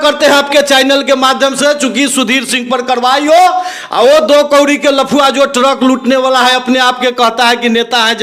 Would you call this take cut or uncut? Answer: uncut